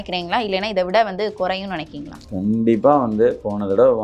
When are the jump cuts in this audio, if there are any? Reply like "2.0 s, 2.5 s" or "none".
none